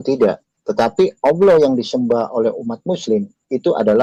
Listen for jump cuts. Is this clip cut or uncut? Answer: uncut